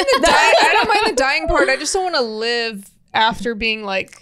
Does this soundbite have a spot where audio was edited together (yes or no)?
no